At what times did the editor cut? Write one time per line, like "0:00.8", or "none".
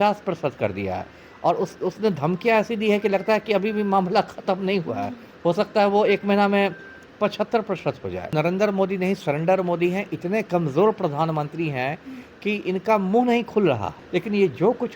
0:08.3
0:13.9